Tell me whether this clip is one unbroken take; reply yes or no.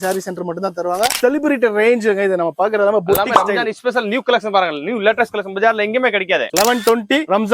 no